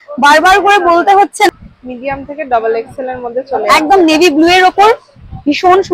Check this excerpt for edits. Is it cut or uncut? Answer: cut